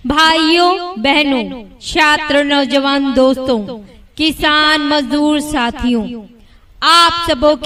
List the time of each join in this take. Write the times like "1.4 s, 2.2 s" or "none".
none